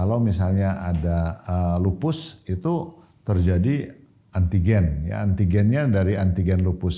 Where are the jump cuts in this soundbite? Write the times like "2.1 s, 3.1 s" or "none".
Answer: 1.4 s